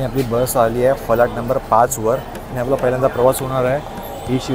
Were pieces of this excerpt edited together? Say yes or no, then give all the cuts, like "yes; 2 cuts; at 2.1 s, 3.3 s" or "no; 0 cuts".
no; 0 cuts